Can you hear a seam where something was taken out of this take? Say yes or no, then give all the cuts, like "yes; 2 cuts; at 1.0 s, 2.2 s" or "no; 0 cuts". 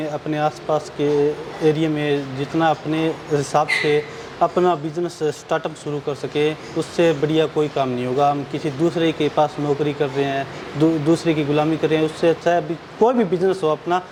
no; 0 cuts